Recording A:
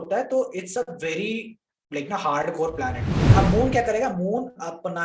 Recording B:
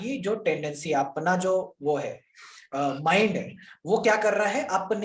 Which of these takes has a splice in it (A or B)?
A